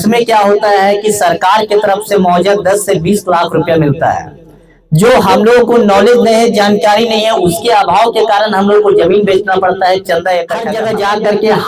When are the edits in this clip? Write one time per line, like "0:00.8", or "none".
0:10.7